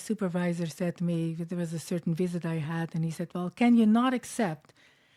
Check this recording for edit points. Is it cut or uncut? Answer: uncut